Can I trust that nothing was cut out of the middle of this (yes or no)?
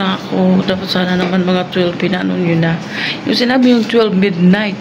yes